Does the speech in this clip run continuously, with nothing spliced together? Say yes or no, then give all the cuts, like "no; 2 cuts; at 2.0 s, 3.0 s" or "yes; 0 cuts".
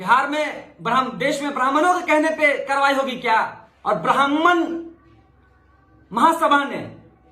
no; 1 cut; at 3.7 s